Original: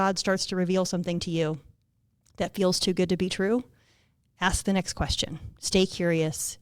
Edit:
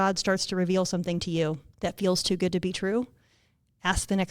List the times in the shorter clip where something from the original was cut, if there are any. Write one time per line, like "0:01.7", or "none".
0:01.7

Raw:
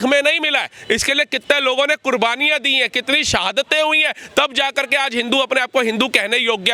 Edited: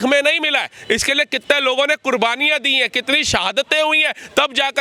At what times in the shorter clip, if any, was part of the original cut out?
none

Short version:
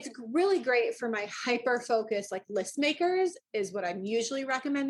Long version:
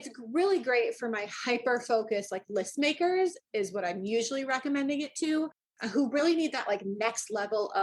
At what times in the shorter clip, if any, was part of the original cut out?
none

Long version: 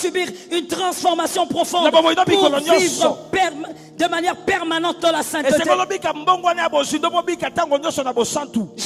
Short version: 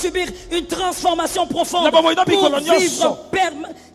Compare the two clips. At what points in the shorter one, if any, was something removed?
none

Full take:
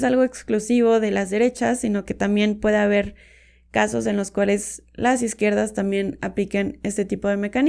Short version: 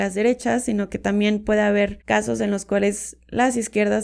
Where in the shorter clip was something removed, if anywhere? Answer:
0:02.0

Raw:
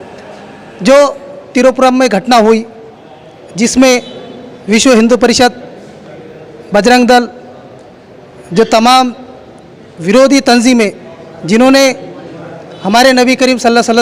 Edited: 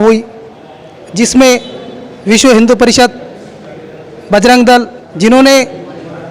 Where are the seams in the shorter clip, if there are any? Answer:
0:05.0

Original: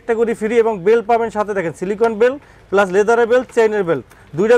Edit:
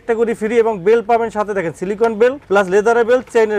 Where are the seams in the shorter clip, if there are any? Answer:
0:02.4

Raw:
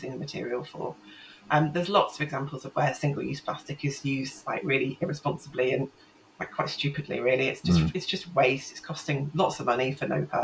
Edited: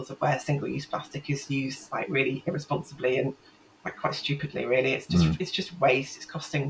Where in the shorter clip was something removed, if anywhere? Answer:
none

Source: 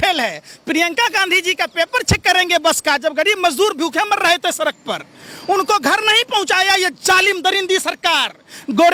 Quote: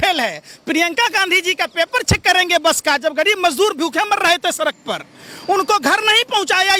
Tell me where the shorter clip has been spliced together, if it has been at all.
none

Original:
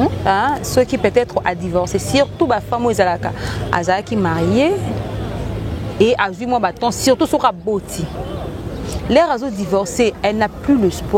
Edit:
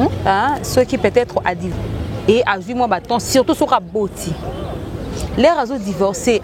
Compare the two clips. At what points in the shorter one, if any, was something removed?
0:01.6

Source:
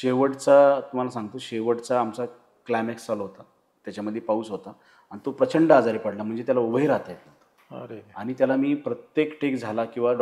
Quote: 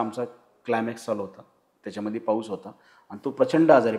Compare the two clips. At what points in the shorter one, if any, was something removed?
none

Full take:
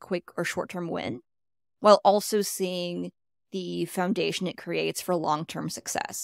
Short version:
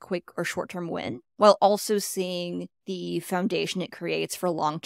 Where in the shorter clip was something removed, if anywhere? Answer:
0:01.2
0:02.8

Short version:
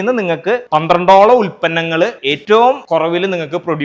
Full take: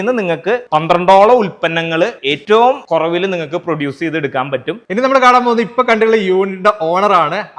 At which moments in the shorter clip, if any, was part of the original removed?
none

